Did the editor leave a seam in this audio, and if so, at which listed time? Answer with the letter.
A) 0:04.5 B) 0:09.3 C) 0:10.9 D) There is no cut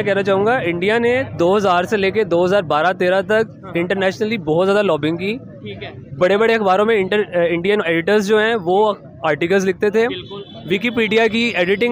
D